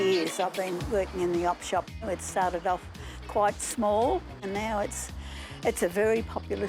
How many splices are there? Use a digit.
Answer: 2